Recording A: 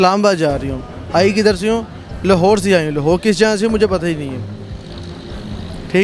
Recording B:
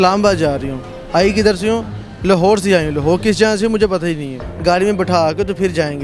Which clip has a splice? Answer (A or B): B